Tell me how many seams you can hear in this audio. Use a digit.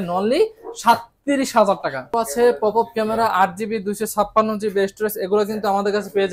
1